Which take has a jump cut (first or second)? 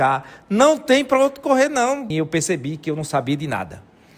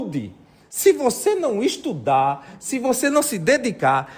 first